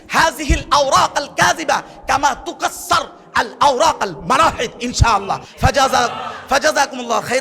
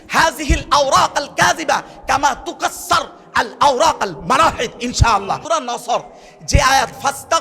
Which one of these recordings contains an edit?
second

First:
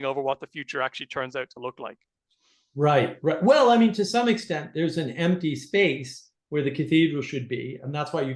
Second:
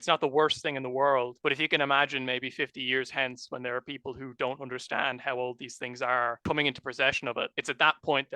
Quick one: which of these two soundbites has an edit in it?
second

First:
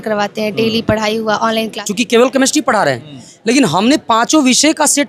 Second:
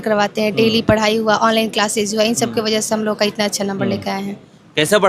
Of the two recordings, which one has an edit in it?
first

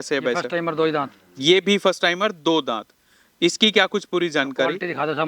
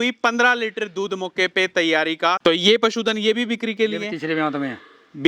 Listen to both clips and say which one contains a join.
second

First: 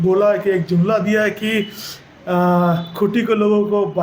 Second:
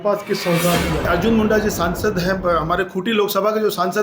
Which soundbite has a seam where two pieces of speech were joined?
second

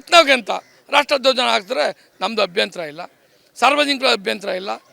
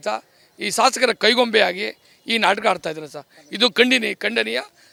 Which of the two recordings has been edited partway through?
first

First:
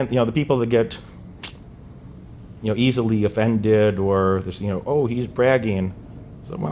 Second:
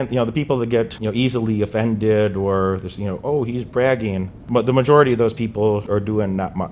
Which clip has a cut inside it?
second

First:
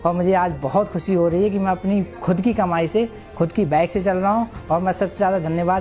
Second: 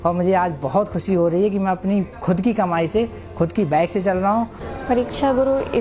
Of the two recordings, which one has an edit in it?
second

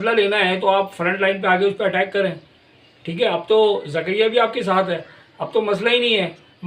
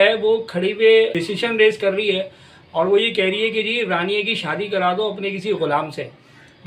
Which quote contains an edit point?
second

